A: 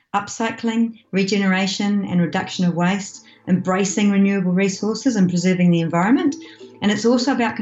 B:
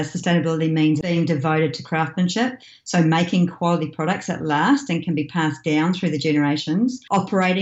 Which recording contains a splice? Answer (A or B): B